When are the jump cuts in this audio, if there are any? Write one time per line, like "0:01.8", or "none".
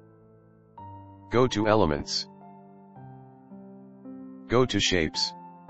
0:01.2
0:02.2
0:04.5